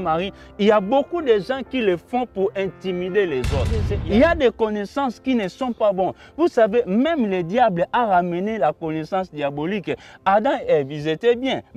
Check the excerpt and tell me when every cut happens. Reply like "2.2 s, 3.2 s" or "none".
3.9 s